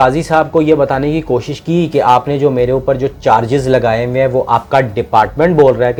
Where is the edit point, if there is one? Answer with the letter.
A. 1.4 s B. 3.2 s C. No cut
C